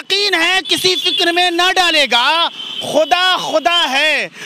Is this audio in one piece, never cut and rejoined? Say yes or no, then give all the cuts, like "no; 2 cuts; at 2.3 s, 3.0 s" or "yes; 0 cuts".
yes; 0 cuts